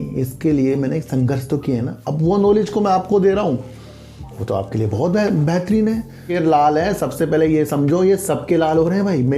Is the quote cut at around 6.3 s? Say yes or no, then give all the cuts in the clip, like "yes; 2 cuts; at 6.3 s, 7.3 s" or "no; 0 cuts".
yes; 1 cut; at 6.3 s